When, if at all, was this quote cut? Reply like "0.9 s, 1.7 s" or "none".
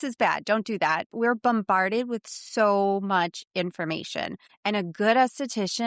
1.1 s, 4.5 s